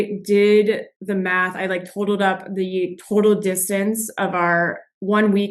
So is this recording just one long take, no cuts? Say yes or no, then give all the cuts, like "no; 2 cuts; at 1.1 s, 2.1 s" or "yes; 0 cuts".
no; 1 cut; at 0.9 s